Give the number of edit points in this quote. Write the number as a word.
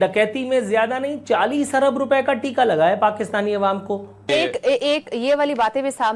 one